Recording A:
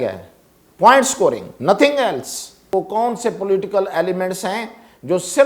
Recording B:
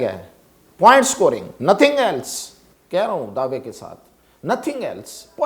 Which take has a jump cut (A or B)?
A